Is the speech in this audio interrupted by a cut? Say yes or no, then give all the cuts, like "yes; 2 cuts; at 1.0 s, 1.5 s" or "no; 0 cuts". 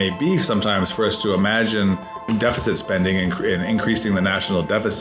yes; 1 cut; at 2.3 s